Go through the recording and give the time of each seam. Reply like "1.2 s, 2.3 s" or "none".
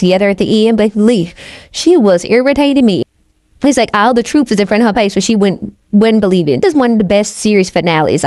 3.1 s, 6.6 s